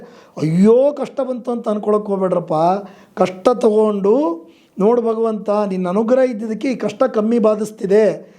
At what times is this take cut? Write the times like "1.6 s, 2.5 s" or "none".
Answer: none